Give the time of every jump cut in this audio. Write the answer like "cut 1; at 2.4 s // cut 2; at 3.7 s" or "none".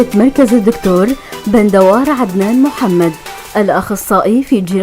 cut 1; at 2.5 s

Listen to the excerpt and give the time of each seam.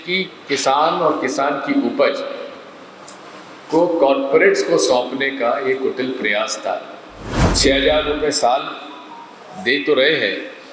cut 1; at 7.5 s

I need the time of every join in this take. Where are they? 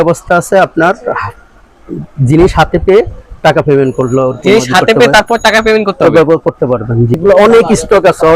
cut 1; at 7.2 s

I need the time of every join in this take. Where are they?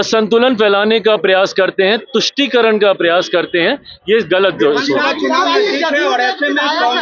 none

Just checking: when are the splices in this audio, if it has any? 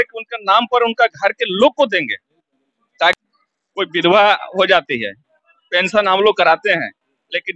cut 1; at 3.2 s

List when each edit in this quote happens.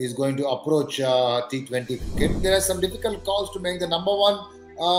cut 1; at 2.4 s

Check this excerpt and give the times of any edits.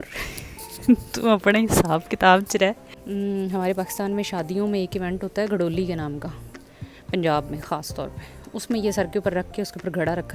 cut 1; at 2.9 s

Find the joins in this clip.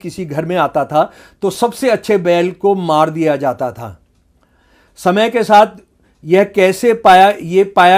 none

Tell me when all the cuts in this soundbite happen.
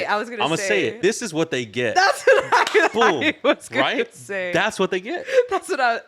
cut 1; at 1.0 s

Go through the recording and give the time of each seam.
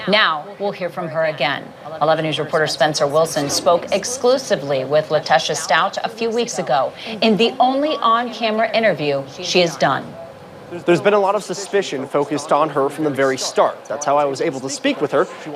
cut 1; at 4.4 s

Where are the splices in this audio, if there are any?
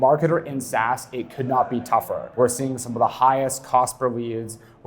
cut 1; at 2.3 s

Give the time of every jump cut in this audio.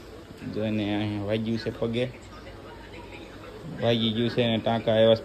cut 1; at 3.6 s

